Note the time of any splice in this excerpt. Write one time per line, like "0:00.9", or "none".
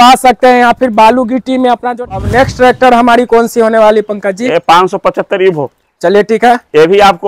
0:01.9